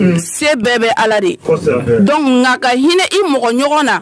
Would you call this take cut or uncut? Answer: uncut